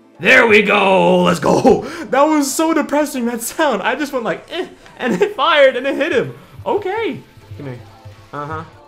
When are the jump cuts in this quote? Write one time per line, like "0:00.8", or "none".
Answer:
0:07.3